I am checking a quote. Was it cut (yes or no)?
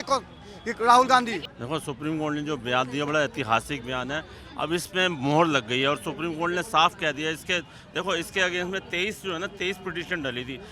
yes